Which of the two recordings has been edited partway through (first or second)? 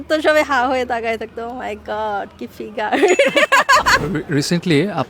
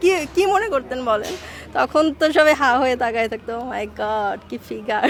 first